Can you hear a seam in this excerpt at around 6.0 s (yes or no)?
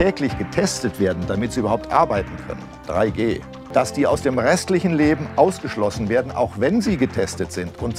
no